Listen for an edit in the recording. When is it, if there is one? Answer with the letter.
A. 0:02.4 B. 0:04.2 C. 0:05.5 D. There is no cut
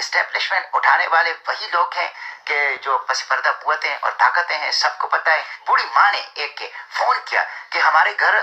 C